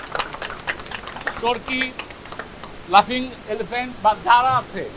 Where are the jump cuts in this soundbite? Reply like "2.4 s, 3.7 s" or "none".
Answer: none